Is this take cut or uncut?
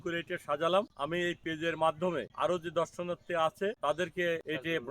cut